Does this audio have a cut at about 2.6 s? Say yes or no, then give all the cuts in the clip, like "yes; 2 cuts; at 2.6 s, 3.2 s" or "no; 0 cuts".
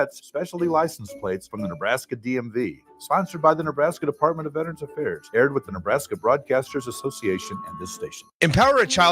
no; 1 cut; at 8.2 s